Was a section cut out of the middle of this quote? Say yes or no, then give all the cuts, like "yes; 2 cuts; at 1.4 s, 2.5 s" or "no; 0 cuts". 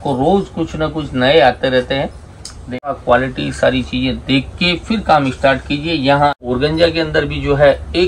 yes; 2 cuts; at 2.9 s, 6.4 s